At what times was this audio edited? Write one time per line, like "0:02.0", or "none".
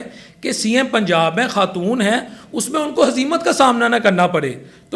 none

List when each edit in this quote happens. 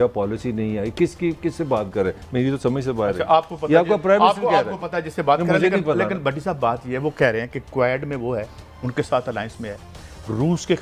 none

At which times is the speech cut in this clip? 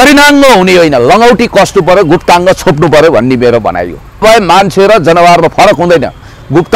0:04.2

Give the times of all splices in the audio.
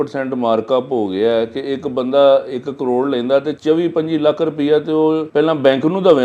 0:03.5
0:05.3

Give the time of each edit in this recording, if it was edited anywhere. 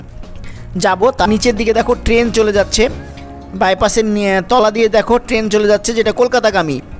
0:01.2

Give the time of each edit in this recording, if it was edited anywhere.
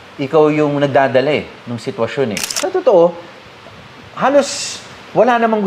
0:02.6

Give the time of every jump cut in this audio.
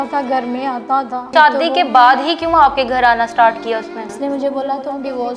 0:01.3
0:04.0

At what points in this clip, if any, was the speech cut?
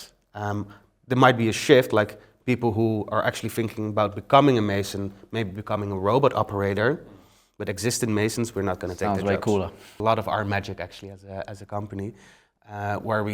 0:09.9

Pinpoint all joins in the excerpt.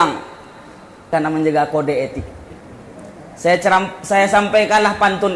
0:01.1

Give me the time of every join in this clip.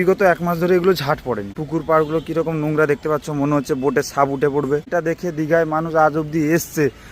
0:01.6
0:04.9

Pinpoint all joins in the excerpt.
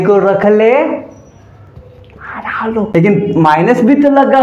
0:02.9

